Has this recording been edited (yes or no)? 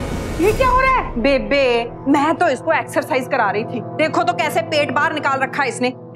yes